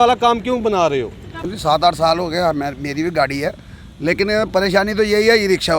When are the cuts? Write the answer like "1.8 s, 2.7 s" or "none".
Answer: 1.5 s